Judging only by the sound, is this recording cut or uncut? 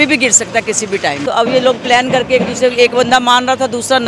cut